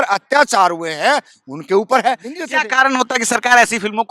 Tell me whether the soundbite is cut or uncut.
cut